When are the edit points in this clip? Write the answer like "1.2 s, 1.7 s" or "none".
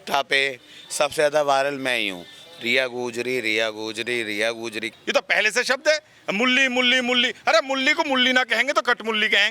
4.9 s